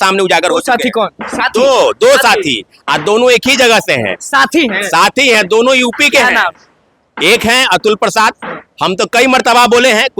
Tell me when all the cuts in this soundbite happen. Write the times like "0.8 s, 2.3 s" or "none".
none